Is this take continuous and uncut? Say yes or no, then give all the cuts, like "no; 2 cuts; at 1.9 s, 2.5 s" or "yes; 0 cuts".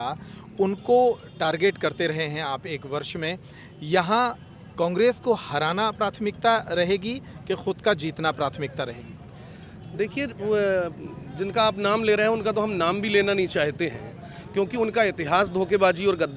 yes; 0 cuts